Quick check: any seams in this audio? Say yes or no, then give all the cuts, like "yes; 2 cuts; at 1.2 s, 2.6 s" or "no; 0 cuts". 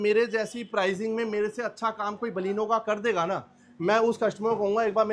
no; 0 cuts